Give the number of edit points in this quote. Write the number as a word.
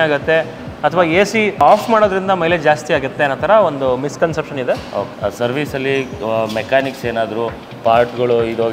two